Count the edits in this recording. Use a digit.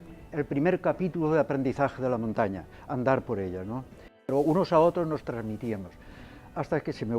1